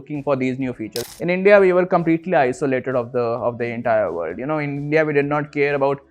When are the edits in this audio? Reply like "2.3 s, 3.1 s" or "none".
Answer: 1.0 s